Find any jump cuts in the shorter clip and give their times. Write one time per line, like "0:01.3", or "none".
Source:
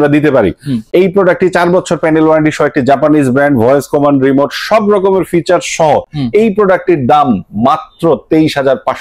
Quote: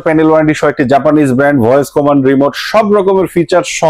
none

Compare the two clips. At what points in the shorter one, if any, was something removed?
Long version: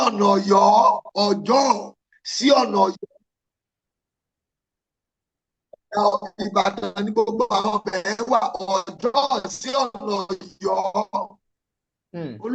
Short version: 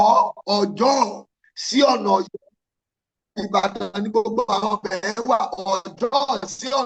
0:03.3

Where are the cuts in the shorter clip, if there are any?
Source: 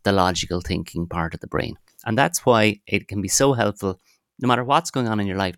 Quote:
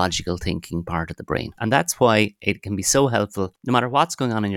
0:01.5
0:03.6

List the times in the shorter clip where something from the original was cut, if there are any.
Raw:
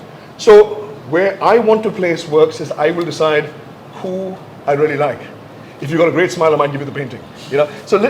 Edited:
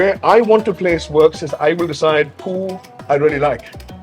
0:02.4

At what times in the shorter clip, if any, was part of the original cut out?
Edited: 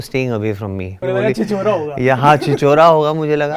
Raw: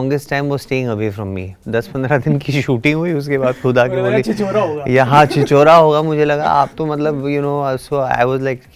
0:01.0

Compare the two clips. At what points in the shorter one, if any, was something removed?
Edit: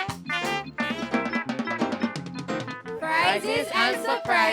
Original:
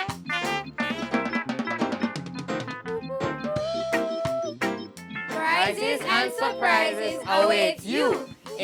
0:02.9

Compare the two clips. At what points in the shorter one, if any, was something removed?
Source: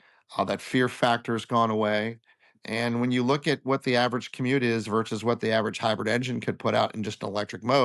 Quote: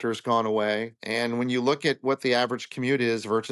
0:01.0

